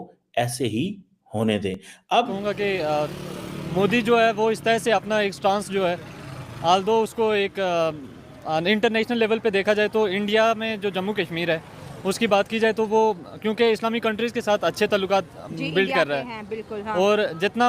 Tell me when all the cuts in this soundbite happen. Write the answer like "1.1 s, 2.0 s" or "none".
2.3 s